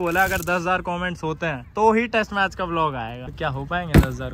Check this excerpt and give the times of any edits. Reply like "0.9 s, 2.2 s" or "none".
3.2 s